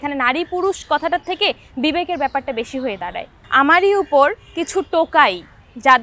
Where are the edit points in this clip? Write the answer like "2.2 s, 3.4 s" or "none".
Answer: 3.3 s